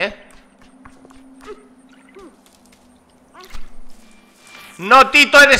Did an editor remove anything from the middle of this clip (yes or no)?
no